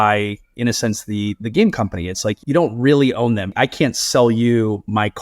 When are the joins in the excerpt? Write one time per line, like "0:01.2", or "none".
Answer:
0:02.4
0:03.5